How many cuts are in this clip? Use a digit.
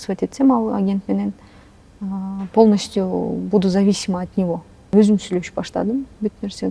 1